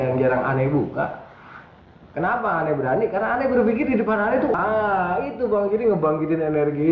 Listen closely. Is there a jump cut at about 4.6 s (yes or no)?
yes